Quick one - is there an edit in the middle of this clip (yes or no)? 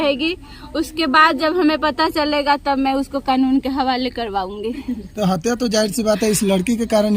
no